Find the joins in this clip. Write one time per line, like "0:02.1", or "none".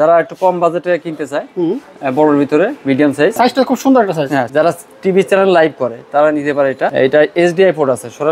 0:03.3
0:04.5
0:06.9